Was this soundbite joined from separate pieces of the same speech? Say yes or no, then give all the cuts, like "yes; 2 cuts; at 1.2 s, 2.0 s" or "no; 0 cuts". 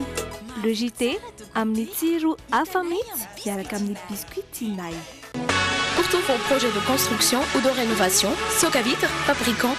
no; 0 cuts